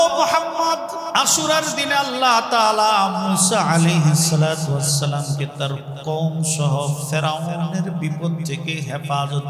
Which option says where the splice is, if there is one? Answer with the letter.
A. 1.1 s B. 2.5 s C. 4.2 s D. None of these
A